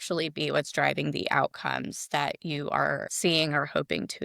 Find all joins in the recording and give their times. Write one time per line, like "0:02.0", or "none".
0:03.1